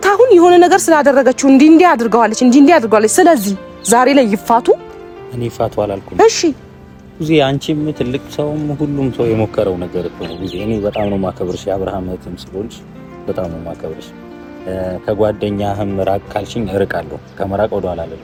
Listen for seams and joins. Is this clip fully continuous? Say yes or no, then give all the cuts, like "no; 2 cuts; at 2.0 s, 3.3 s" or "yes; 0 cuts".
yes; 0 cuts